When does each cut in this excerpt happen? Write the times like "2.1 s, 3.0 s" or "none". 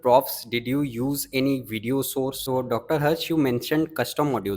2.4 s